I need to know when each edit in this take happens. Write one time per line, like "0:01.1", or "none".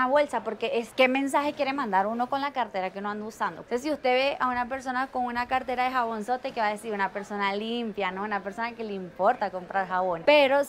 0:03.6